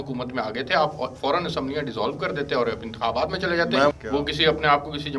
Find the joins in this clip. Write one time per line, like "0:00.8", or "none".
0:04.0